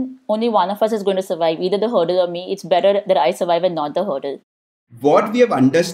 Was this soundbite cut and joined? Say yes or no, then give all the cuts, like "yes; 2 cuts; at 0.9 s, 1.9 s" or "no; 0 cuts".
yes; 1 cut; at 4.7 s